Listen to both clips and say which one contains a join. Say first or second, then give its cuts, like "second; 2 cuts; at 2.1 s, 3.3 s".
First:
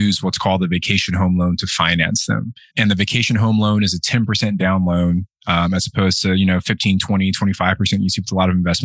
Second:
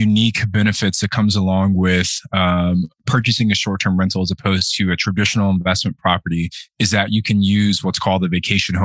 first; 1 cut; at 2.7 s